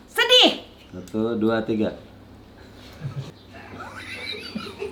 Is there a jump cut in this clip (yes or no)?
yes